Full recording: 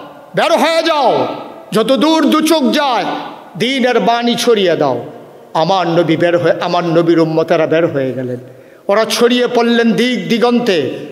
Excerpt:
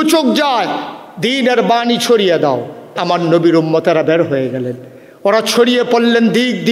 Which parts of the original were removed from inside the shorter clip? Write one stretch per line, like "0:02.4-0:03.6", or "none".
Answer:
0:05.4-0:06.6